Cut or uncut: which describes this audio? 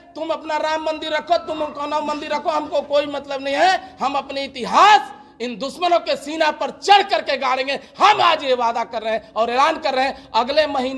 uncut